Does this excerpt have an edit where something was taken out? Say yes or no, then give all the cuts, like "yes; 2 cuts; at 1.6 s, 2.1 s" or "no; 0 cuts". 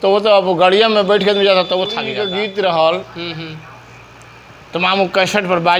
yes; 1 cut; at 2.2 s